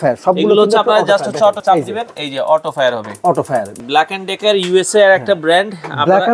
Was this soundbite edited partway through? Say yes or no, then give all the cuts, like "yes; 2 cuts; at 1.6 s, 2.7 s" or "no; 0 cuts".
yes; 2 cuts; at 1.6 s, 3.7 s